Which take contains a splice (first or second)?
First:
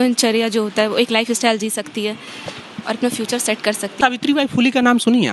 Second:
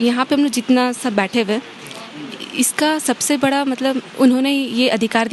first